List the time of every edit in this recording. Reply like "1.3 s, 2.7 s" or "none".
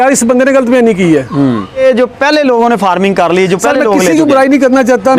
1.8 s